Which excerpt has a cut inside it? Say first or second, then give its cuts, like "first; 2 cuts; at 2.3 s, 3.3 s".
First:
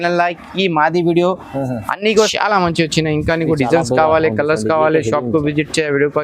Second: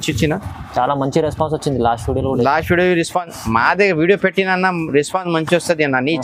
first; 1 cut; at 2.3 s